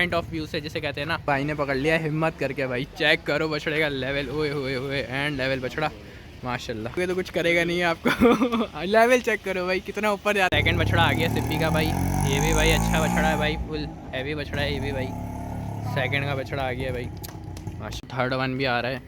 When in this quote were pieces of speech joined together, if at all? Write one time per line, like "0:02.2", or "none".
0:01.2
0:07.0
0:10.5
0:17.9